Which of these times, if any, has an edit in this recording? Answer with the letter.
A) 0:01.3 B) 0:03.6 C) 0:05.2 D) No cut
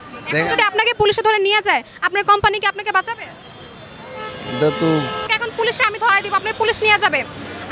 C